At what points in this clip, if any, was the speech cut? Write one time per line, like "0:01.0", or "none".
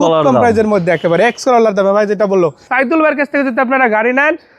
0:02.6